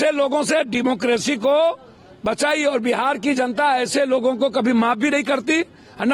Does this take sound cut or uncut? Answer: uncut